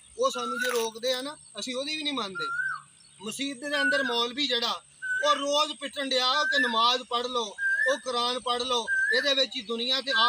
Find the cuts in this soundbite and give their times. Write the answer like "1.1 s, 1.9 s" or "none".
none